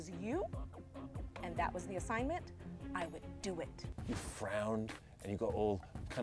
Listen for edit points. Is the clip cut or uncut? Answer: cut